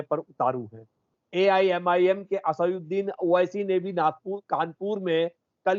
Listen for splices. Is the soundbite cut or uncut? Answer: cut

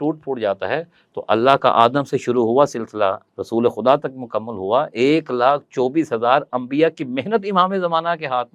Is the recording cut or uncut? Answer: uncut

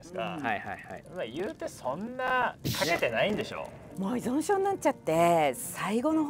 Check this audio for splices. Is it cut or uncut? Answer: cut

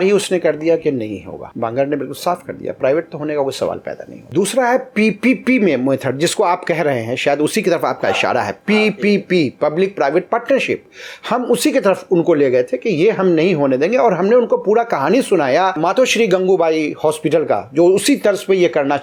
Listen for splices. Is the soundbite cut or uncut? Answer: uncut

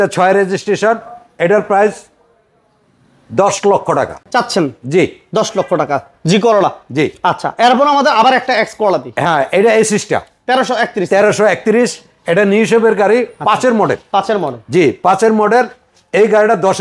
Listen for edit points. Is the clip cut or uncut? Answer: uncut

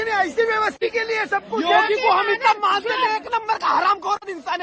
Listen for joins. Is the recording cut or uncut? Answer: uncut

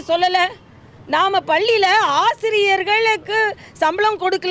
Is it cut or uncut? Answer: uncut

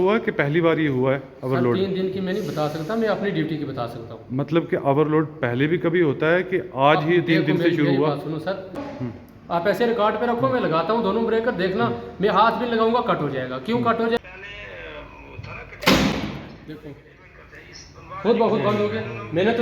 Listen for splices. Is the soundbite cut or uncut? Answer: cut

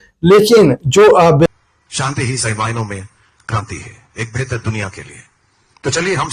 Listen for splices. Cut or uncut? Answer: cut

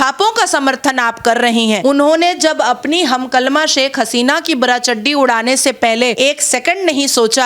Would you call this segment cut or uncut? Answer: cut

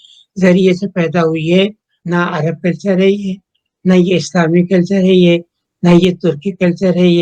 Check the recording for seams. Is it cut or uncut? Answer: cut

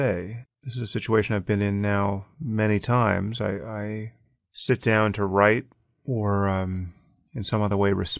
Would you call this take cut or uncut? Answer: uncut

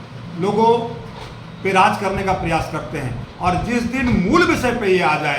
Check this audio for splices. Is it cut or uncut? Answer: uncut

